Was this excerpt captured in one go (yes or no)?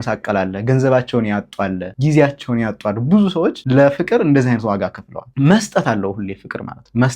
yes